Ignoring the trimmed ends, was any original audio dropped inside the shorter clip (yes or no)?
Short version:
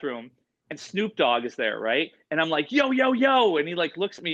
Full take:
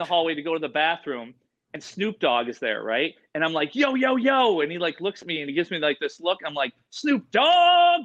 no